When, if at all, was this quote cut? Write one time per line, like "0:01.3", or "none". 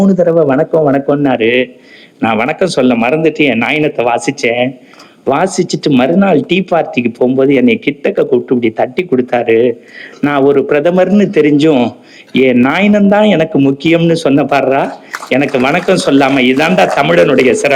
none